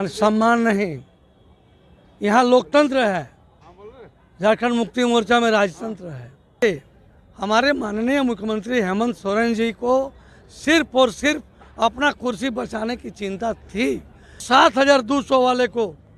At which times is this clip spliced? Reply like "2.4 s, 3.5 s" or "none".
6.6 s, 14.4 s